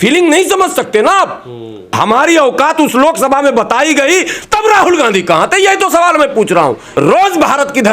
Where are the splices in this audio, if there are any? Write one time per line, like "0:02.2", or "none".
0:01.9
0:06.8